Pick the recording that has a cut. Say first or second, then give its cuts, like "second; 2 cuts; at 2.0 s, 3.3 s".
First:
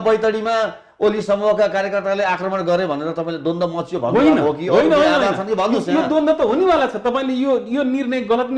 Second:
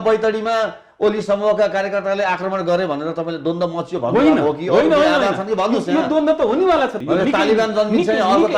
second; 1 cut; at 7.0 s